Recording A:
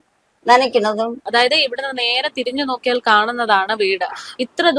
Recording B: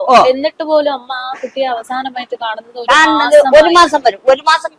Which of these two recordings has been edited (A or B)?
A